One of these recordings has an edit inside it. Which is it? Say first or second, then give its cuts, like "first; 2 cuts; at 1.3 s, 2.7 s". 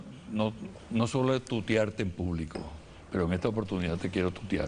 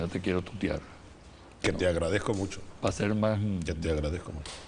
first; 1 cut; at 1.5 s